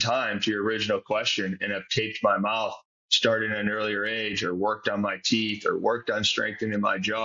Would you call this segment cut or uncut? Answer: uncut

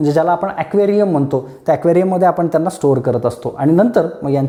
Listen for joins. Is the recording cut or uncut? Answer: uncut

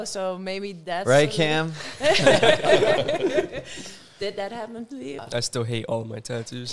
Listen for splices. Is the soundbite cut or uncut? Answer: cut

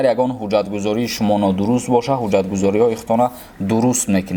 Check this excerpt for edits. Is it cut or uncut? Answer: uncut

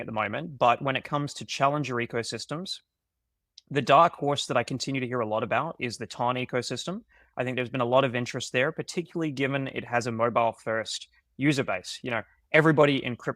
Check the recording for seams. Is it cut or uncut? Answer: uncut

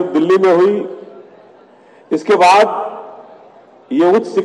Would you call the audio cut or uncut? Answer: uncut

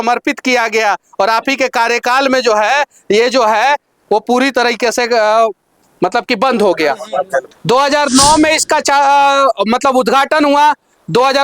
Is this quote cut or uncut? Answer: cut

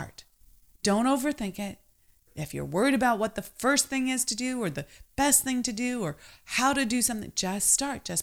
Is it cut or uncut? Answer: cut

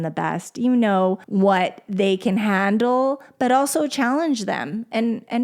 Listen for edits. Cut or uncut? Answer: cut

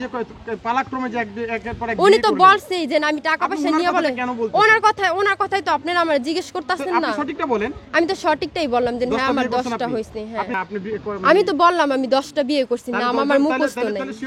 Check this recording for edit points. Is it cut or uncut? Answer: cut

